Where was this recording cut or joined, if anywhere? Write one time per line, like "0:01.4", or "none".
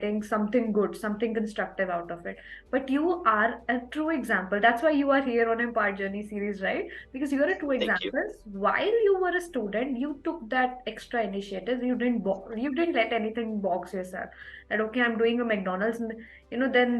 none